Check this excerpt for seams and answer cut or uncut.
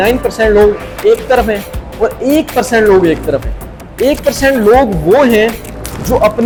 uncut